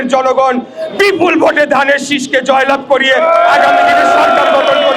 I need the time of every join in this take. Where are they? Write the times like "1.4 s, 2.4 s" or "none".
none